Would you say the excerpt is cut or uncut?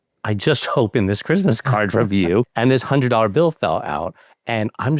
cut